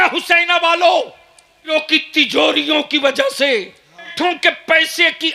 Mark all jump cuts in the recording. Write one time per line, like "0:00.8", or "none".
0:01.7
0:04.1